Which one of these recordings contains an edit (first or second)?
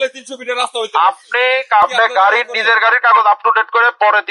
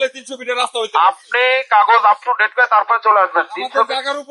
first